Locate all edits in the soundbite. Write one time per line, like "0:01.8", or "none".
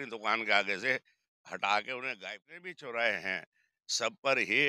0:02.1

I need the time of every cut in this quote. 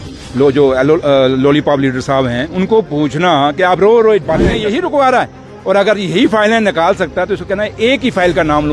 0:04.6

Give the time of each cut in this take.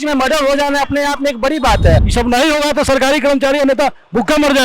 0:02.1

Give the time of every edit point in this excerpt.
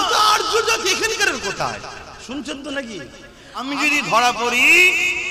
0:03.6

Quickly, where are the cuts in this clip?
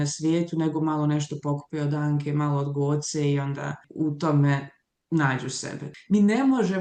0:03.8
0:05.9

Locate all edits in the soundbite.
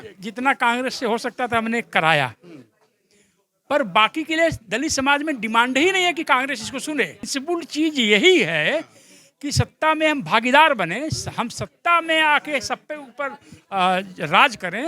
0:07.3

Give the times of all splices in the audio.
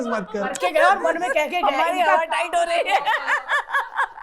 none

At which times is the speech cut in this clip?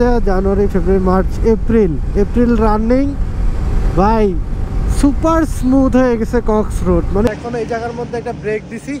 0:07.3

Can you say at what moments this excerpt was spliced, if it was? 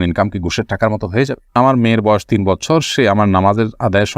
0:01.5

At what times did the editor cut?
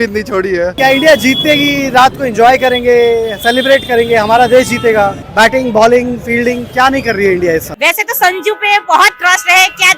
0:00.7
0:05.2
0:07.7

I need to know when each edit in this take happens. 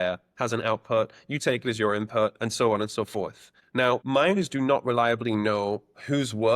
0:03.8

